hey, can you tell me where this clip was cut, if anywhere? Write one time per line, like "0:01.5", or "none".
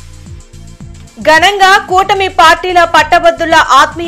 0:00.9